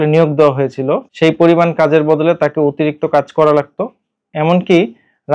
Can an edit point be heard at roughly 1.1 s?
yes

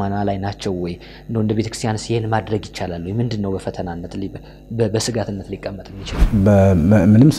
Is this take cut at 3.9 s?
no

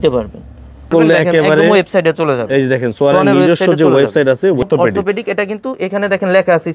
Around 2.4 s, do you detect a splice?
no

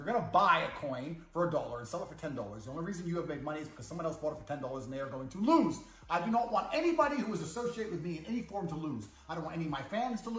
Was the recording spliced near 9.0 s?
no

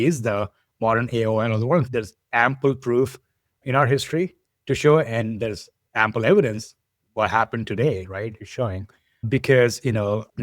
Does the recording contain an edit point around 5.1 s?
no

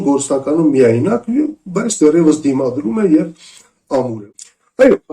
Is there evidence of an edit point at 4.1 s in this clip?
yes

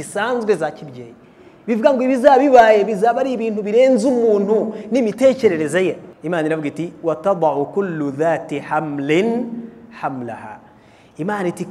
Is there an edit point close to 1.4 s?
no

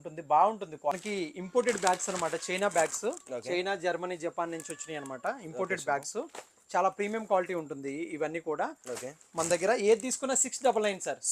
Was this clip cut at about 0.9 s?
yes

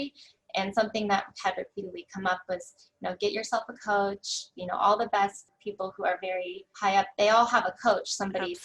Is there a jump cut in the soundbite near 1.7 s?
no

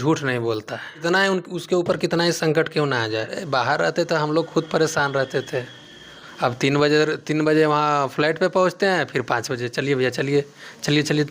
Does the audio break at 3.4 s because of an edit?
yes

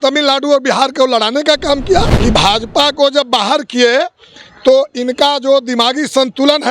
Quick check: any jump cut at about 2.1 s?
yes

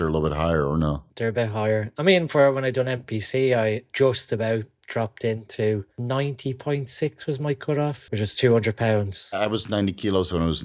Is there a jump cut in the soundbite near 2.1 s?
no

